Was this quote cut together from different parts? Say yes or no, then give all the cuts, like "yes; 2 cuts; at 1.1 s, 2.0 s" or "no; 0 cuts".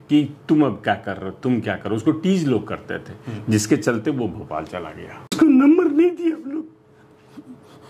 yes; 1 cut; at 5.3 s